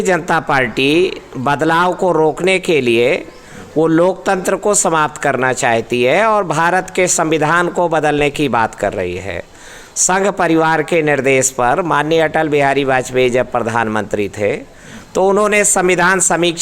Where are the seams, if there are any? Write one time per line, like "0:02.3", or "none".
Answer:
none